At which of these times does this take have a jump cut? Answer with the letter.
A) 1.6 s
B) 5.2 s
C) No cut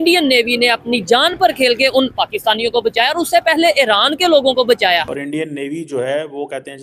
B